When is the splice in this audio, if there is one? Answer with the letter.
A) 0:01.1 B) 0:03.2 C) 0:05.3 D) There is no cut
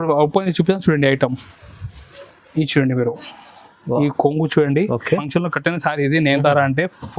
C